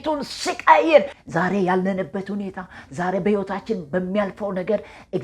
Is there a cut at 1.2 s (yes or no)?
yes